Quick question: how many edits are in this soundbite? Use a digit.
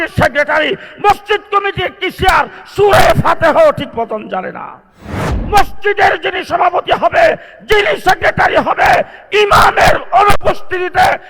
1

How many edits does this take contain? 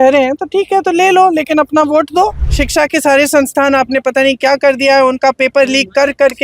1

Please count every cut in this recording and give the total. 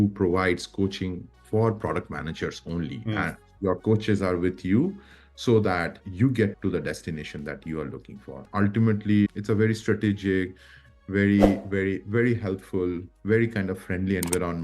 1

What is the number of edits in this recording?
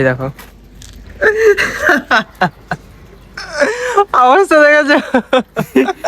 1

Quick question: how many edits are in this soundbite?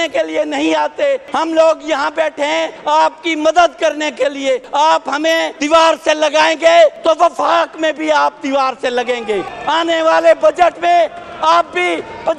6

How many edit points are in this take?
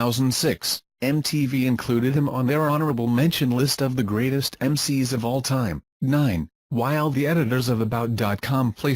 1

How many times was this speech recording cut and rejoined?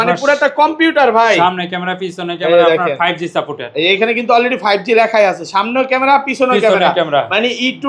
0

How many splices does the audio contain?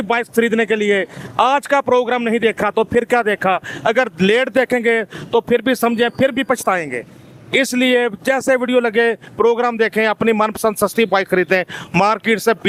0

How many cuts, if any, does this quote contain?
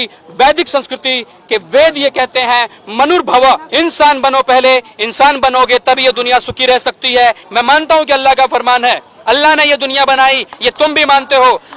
2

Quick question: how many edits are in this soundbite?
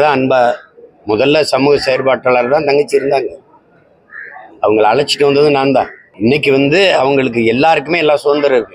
1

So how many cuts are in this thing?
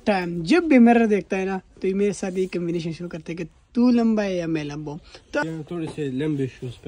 1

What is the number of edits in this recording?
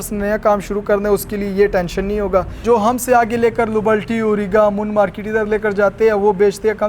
1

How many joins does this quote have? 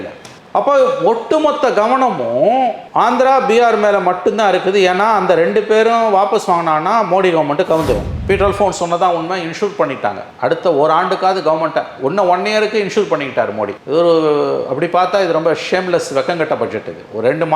1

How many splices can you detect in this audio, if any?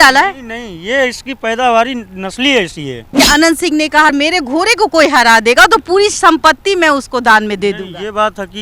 2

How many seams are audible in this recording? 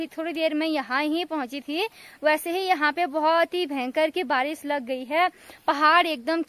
0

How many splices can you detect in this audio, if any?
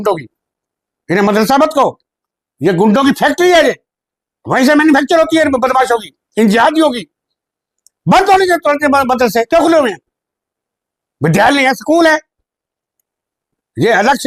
0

